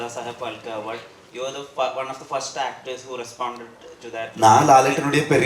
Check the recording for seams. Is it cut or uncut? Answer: uncut